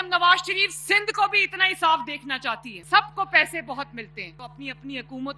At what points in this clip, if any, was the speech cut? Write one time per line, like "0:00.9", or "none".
0:02.7
0:04.4